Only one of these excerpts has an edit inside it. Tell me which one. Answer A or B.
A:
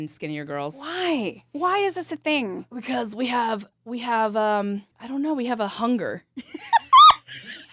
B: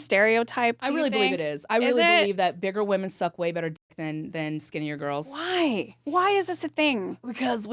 A